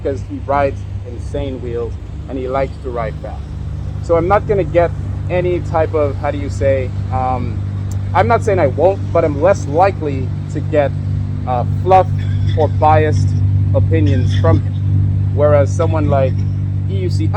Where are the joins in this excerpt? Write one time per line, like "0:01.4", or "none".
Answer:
none